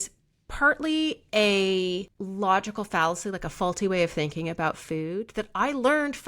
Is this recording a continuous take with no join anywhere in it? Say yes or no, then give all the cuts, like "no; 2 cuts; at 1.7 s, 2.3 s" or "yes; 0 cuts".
no; 1 cut; at 2.2 s